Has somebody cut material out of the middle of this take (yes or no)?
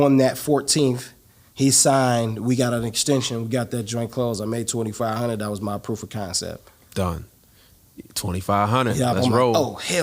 no